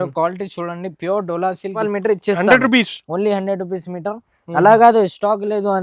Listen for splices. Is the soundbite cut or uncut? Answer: cut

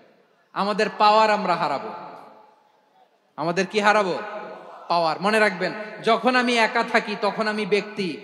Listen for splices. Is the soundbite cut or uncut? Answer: uncut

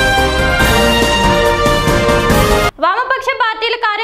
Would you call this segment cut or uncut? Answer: cut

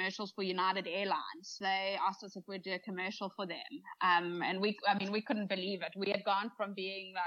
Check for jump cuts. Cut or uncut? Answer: cut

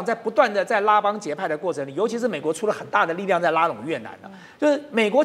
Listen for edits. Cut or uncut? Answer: uncut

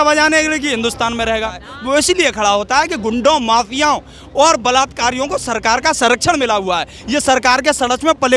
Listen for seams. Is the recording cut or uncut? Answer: cut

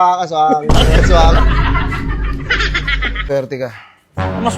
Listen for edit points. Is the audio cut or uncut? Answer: cut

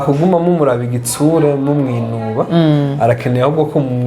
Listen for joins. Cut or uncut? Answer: uncut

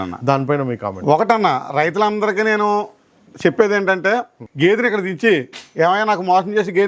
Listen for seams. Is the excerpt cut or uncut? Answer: cut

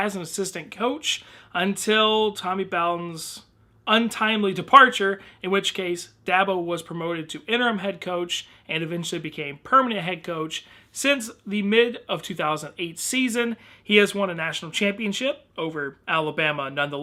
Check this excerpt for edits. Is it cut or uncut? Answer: uncut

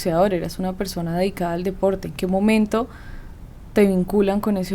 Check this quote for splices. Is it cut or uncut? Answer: uncut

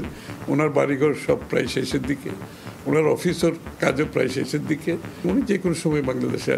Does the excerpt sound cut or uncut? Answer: cut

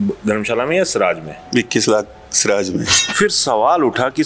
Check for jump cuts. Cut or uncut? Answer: cut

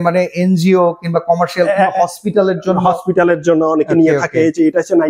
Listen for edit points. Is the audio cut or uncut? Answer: uncut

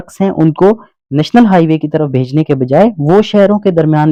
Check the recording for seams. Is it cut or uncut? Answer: uncut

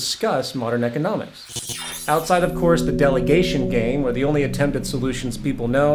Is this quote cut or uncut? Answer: uncut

